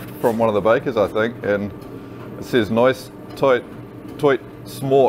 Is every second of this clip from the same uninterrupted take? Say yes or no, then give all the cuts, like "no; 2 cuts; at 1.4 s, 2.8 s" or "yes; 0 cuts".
yes; 0 cuts